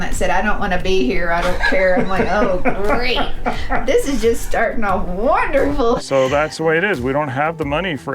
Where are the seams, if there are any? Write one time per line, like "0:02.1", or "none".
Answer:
0:06.0